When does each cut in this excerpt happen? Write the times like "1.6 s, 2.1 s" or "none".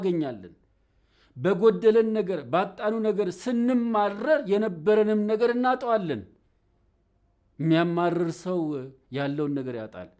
none